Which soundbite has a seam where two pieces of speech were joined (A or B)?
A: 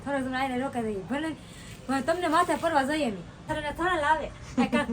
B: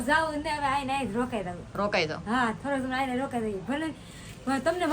A